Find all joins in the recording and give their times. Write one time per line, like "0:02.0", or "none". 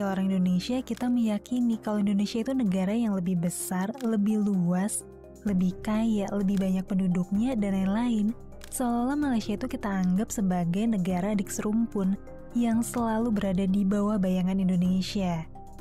none